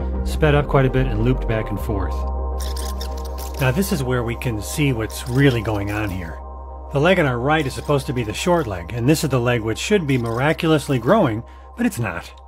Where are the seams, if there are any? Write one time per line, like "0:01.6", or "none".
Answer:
none